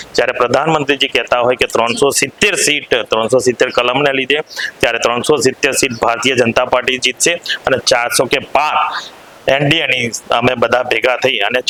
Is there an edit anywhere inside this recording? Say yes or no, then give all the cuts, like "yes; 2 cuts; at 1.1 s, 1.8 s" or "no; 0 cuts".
no; 0 cuts